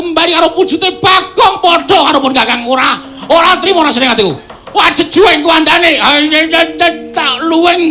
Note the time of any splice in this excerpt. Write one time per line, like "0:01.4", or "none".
0:05.4